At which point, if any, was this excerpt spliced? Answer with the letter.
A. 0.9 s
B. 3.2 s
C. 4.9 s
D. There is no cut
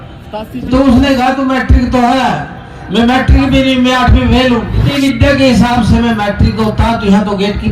C